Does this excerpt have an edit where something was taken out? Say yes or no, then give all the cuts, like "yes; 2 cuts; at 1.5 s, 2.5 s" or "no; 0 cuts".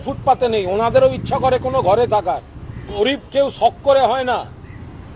yes; 1 cut; at 3.0 s